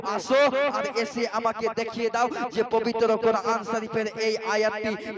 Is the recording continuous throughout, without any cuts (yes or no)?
yes